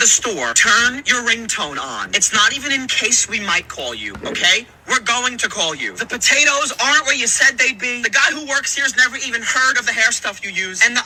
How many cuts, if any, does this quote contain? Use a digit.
0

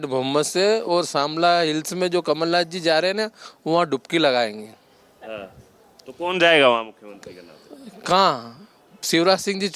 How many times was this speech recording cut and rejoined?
0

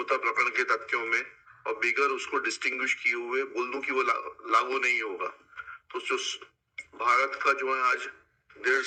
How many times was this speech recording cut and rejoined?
0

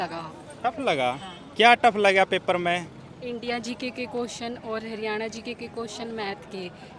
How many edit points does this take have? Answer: 0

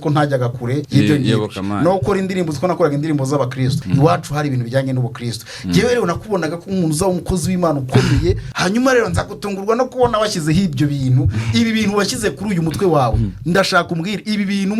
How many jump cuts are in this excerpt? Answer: 3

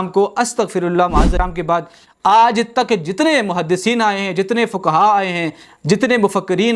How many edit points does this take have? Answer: 1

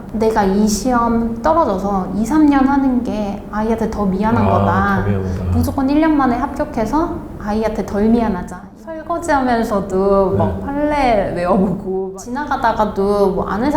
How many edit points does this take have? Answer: 2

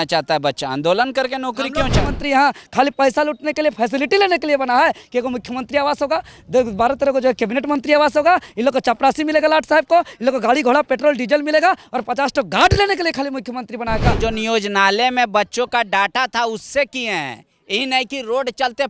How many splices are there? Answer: 2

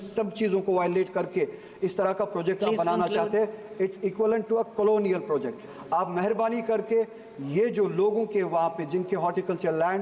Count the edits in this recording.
0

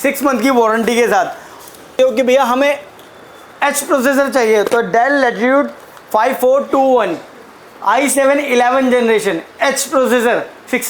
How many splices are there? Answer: 1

